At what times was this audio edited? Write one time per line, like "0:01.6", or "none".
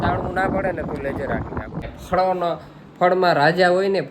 0:01.9